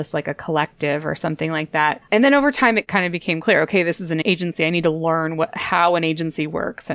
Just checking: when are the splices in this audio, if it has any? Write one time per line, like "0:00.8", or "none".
0:02.0
0:02.9
0:04.2